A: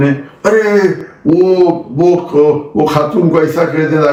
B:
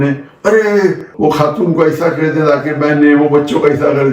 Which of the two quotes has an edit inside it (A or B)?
B